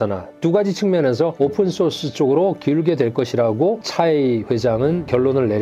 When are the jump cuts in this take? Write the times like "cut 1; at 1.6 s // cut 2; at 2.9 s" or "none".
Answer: cut 1; at 3.8 s